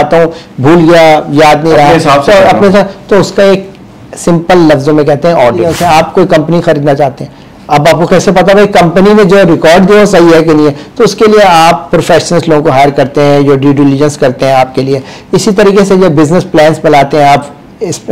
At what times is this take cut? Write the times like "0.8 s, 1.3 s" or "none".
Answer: 5.7 s